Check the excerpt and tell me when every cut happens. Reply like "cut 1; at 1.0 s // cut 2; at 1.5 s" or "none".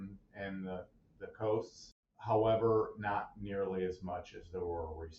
cut 1; at 2.1 s